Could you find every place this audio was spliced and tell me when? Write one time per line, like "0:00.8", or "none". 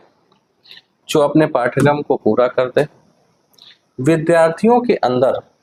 none